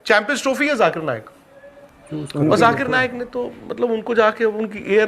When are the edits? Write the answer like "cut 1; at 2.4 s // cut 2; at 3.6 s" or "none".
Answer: cut 1; at 0.9 s